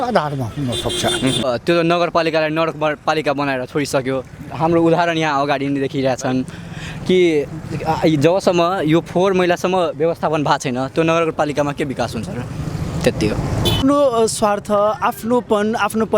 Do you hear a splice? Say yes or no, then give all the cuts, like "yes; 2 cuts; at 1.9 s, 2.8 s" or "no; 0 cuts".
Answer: yes; 2 cuts; at 1.5 s, 13.8 s